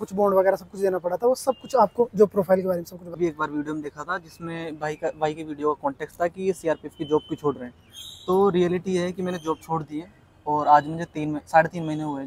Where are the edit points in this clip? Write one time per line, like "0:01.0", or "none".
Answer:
0:03.2